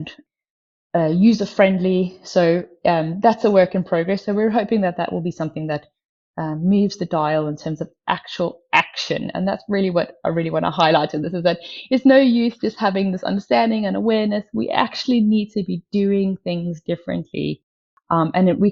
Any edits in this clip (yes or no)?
no